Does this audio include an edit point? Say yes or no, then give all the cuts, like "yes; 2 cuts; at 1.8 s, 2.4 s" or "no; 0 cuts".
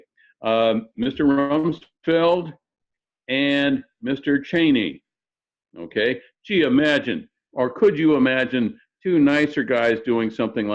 no; 0 cuts